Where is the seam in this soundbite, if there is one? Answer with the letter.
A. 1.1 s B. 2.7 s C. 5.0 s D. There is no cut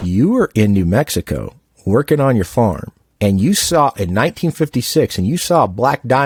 D